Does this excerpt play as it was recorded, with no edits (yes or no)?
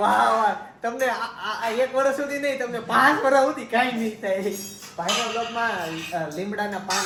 yes